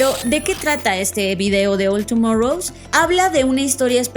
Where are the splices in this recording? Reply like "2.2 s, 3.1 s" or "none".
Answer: 2.7 s